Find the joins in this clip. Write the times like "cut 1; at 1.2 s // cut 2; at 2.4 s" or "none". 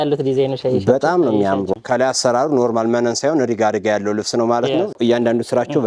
cut 1; at 1.7 s // cut 2; at 5.0 s